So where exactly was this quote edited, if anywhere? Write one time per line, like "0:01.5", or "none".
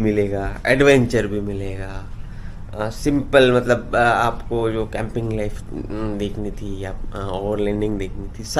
none